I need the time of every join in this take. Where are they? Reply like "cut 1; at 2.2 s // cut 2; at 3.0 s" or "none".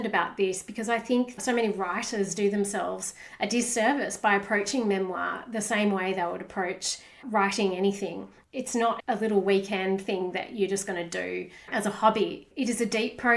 cut 1; at 1.3 s // cut 2; at 8.5 s